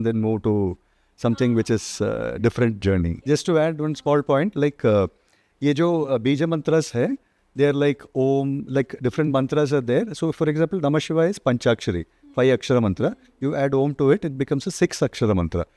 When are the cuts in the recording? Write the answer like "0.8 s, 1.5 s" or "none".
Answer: none